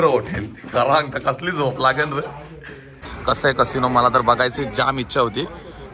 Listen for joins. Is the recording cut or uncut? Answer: cut